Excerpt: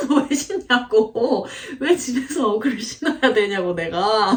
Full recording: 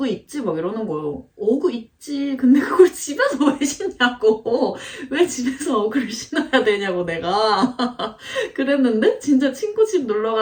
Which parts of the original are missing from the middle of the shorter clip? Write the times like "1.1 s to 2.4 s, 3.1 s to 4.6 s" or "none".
none